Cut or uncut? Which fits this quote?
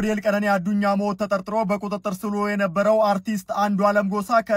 uncut